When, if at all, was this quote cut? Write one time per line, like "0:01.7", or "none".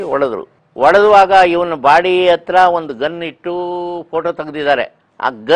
none